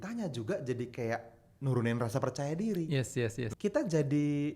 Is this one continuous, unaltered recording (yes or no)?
no